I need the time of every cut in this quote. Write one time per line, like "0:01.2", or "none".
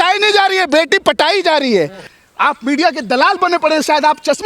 0:02.0